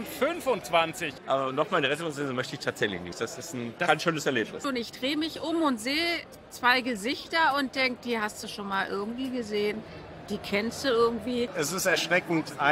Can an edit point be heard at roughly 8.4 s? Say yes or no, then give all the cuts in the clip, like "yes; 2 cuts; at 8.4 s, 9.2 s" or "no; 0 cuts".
no; 3 cuts; at 1.1 s, 4.6 s, 11.5 s